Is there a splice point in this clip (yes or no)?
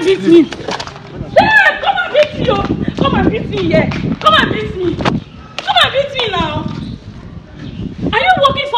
no